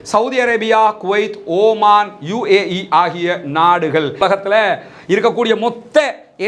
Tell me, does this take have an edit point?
yes; 1 cut; at 4.2 s

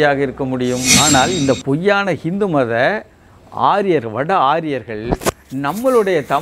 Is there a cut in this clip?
yes; 1 cut; at 0.9 s

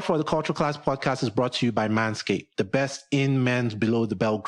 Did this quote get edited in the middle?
no; 0 cuts

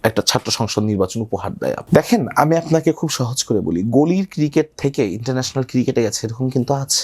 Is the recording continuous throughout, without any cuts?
no; 1 cut; at 1.8 s

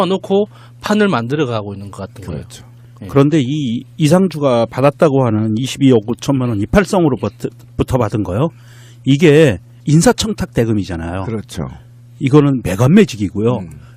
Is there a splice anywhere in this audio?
yes; 1 cut; at 1.6 s

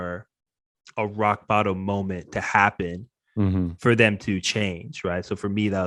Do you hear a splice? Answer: no; 0 cuts

